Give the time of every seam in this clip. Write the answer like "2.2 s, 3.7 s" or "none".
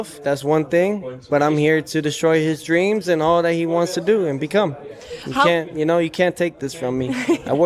none